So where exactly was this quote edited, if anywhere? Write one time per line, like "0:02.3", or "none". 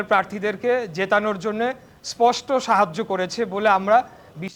none